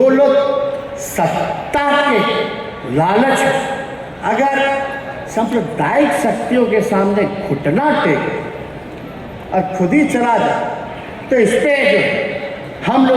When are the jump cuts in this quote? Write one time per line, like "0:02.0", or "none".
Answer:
none